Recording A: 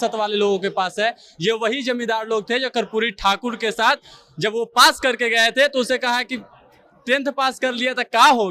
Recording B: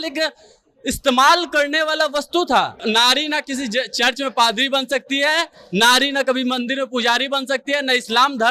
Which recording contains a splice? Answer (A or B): B